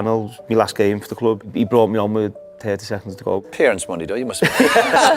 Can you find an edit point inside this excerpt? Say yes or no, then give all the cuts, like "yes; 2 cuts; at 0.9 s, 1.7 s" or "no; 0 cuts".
yes; 2 cuts; at 1.5 s, 3.4 s